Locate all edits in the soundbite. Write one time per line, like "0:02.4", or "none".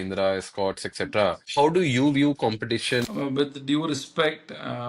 0:01.4
0:03.0